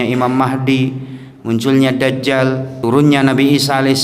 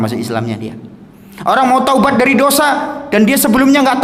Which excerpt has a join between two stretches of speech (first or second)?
first